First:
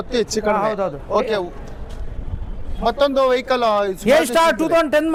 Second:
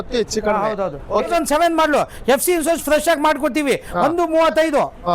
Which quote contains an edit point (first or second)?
second